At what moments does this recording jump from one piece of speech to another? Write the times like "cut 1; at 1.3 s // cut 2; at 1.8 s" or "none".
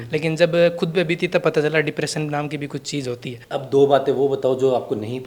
cut 1; at 3.3 s